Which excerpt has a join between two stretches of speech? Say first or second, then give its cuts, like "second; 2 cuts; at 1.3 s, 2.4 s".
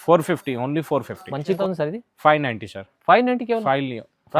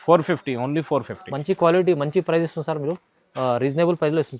first; 1 cut; at 1.6 s